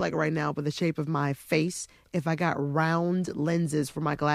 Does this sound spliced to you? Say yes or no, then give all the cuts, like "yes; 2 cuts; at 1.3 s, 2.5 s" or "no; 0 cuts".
no; 0 cuts